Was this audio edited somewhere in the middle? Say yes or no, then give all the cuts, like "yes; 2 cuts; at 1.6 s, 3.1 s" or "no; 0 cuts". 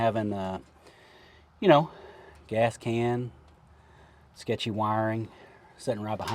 no; 0 cuts